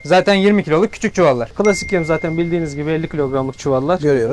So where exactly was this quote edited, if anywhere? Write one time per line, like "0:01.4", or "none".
0:01.5